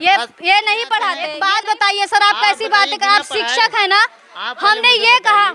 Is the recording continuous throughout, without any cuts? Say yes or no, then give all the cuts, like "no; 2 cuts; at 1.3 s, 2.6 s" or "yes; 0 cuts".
no; 1 cut; at 1.3 s